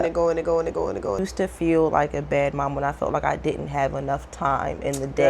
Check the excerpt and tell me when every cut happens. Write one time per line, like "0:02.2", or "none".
0:01.2